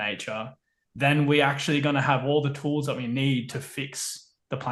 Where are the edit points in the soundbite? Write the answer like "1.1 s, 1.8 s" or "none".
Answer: none